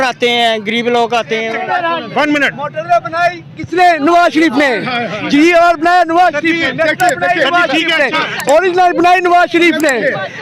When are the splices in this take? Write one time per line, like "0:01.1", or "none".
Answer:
0:01.5